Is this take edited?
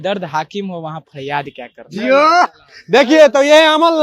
no; 0 cuts

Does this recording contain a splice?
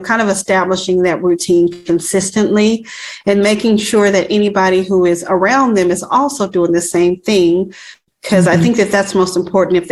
no; 0 cuts

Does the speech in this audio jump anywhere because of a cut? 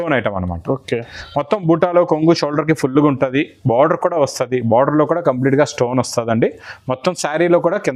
no; 0 cuts

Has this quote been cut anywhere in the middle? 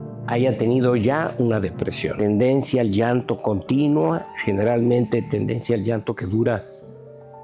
yes; 1 cut; at 2.1 s

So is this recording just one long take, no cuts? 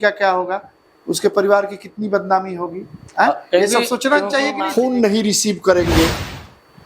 no; 1 cut; at 4.6 s

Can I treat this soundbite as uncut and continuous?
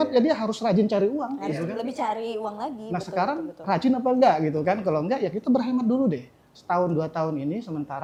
yes; 0 cuts

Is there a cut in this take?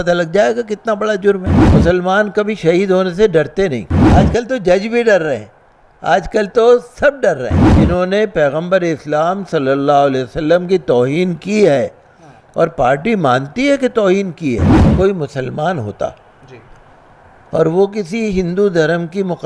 yes; 4 cuts; at 1.6 s, 4.0 s, 7.7 s, 14.8 s

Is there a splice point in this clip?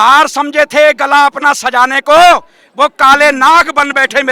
no; 0 cuts

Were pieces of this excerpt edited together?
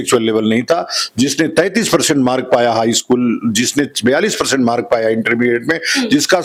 no; 0 cuts

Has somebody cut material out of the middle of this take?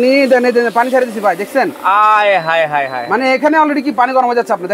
no; 0 cuts

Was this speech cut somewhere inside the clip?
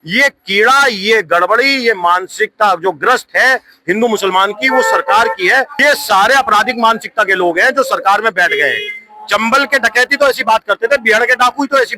yes; 1 cut; at 5.7 s

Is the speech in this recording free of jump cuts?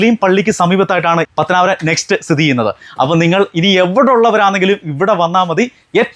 yes; 0 cuts

